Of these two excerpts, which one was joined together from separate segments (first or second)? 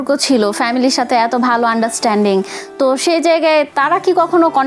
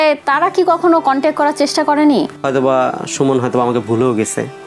second